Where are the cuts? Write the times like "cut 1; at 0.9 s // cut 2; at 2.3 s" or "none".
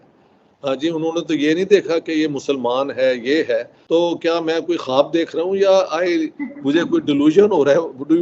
cut 1; at 3.7 s